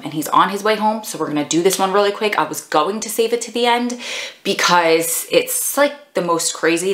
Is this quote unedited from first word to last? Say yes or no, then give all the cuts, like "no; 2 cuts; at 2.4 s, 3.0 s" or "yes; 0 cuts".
yes; 0 cuts